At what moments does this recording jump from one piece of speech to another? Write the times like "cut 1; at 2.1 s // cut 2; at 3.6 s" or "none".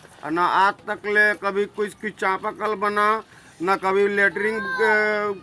none